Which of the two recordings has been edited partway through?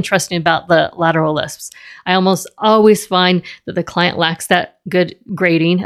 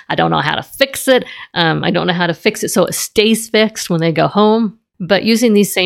second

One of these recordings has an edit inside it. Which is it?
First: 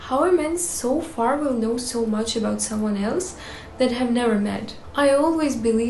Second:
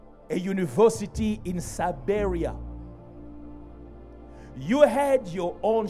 first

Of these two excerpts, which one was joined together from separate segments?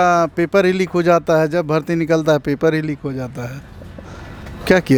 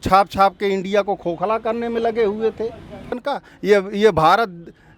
second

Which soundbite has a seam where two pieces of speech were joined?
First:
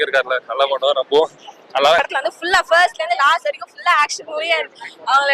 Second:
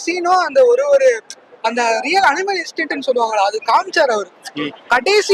first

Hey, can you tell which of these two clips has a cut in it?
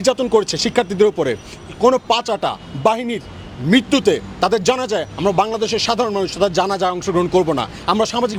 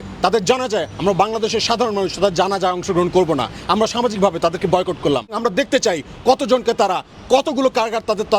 second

